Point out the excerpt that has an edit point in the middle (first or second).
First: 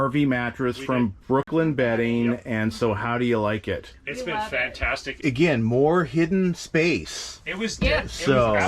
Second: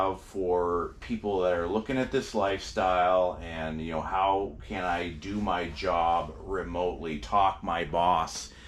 first